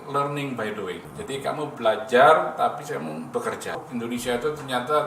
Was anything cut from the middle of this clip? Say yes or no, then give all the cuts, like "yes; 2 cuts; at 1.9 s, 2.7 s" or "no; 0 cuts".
yes; 2 cuts; at 1.1 s, 3.8 s